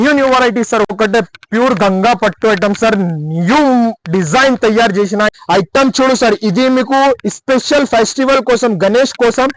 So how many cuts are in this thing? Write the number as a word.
two